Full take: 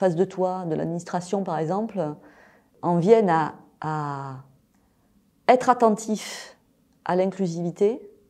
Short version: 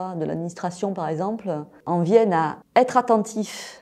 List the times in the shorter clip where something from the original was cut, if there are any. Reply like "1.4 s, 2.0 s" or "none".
1.7 s, 2.6 s